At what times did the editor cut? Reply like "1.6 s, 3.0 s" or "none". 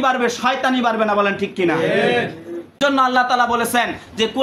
2.7 s